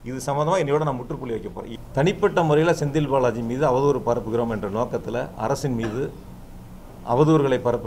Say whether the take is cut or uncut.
cut